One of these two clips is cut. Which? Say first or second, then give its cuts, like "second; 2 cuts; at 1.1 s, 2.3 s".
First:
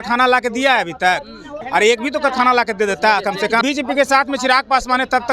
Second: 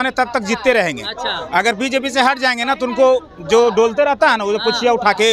first; 2 cuts; at 1.5 s, 3.6 s